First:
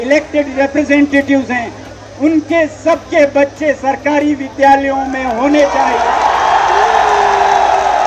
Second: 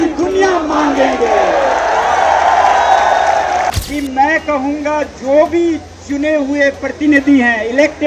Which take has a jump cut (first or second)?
second